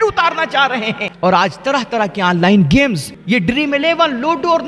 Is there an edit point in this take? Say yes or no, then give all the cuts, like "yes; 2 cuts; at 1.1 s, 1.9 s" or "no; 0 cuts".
yes; 2 cuts; at 1.0 s, 3.1 s